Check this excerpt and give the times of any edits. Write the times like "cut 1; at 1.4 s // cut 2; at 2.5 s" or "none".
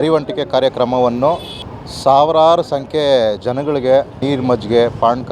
cut 1; at 4.2 s